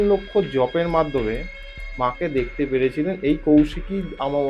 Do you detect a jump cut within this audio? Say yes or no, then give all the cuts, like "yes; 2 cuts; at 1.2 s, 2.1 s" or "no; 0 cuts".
no; 0 cuts